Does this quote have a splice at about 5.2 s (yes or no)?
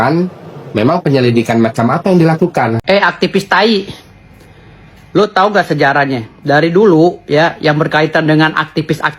no